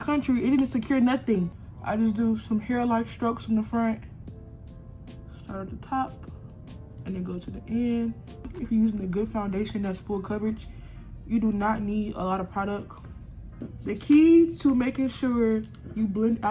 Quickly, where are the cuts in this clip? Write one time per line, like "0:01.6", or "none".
0:01.5
0:04.2
0:08.6
0:13.7